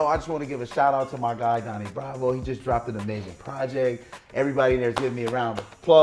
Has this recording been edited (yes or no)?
no